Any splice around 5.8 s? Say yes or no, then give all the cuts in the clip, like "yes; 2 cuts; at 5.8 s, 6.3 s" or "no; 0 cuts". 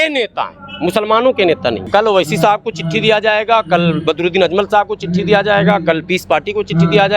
no; 1 cut; at 1.8 s